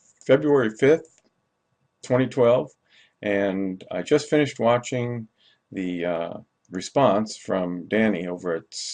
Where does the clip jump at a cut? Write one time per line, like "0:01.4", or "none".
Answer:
0:01.7